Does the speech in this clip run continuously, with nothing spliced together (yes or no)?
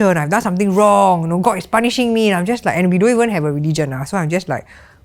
yes